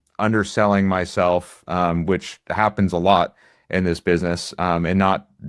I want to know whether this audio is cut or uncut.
uncut